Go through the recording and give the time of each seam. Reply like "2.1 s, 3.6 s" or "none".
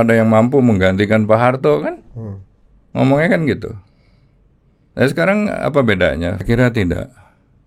6.4 s

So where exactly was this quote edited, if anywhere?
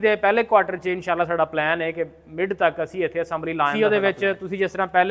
3.7 s

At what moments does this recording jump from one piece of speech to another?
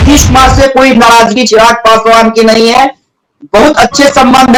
none

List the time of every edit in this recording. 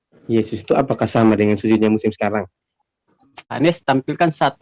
3.4 s

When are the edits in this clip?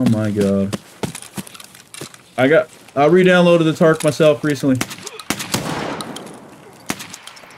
2.2 s

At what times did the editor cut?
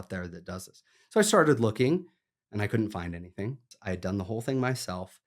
3.7 s

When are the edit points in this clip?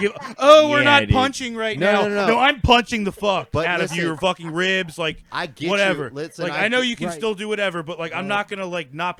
none

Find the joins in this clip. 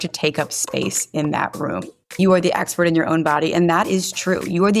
2.2 s

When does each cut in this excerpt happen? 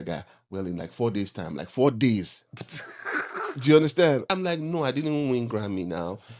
4.3 s

